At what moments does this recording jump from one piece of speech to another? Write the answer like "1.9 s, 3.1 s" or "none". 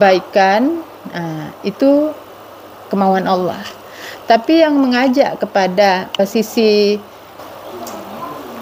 none